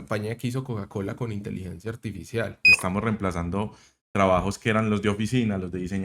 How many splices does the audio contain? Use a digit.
1